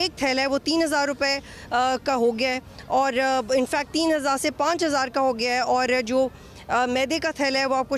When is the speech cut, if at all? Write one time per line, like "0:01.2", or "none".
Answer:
none